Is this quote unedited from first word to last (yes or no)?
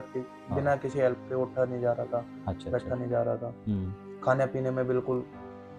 yes